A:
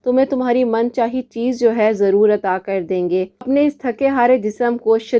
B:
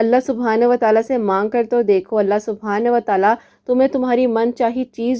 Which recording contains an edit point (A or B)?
A